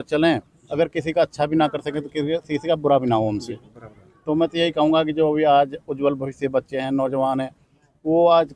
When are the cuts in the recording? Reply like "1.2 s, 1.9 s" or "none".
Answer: none